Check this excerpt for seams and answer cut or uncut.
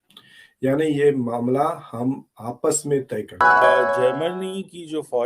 cut